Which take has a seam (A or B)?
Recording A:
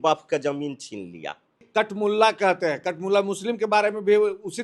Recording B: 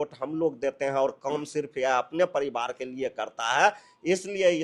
A